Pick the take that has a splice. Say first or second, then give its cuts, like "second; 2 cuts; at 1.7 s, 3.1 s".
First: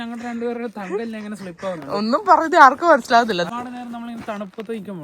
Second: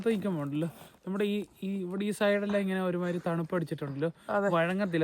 first; 1 cut; at 3.5 s